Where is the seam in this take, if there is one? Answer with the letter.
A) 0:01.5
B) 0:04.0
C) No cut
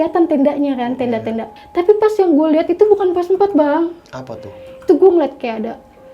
A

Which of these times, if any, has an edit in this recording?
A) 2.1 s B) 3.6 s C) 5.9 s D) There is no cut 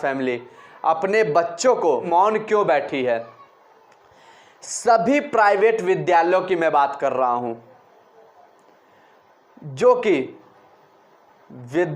A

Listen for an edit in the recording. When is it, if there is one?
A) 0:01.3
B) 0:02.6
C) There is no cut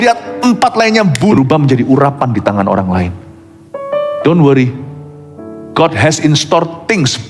A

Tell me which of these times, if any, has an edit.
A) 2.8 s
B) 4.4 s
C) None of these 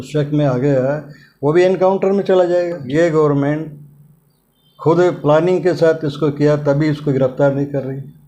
A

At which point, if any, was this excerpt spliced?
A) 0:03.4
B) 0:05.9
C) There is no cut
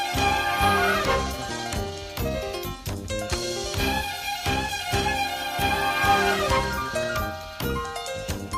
A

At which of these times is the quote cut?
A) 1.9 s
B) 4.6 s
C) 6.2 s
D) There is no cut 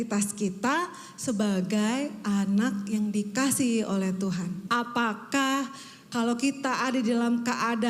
B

